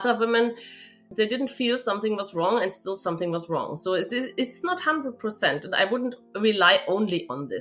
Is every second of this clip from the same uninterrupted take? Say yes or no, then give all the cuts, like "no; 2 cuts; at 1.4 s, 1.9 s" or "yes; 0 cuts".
no; 1 cut; at 1.0 s